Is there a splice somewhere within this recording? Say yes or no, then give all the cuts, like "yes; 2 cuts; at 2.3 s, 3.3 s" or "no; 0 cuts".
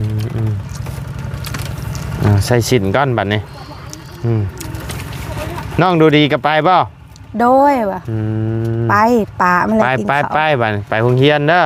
no; 0 cuts